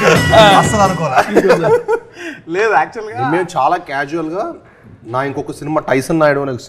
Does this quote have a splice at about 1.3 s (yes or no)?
no